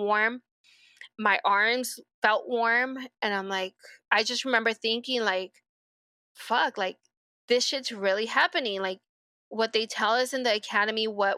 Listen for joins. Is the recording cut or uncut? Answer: uncut